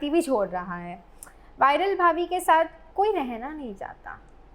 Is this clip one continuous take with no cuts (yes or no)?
no